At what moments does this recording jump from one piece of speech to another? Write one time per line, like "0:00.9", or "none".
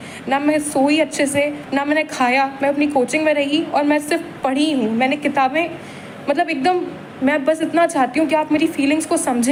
none